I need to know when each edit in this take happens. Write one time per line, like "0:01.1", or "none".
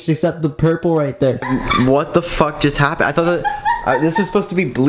0:01.4